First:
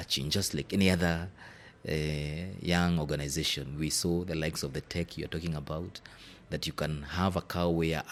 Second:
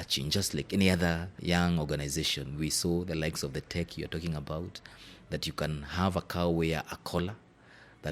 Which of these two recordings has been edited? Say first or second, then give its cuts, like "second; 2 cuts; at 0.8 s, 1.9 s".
second; 1 cut; at 1.3 s